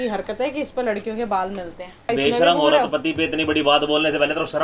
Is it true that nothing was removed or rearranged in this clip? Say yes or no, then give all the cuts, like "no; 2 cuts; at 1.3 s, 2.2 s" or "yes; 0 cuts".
no; 1 cut; at 2.1 s